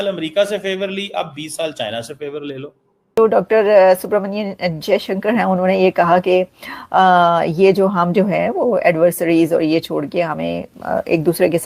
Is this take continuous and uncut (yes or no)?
no